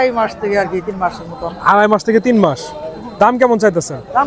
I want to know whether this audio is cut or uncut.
uncut